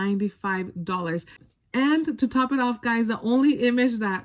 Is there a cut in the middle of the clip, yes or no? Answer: no